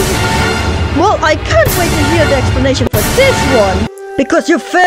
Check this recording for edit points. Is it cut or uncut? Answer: cut